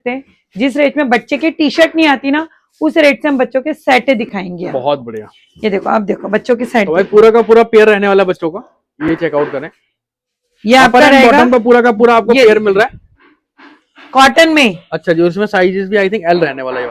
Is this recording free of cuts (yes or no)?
yes